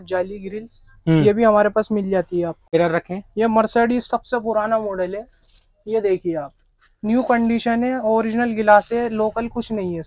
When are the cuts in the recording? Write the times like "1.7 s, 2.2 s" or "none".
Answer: 2.6 s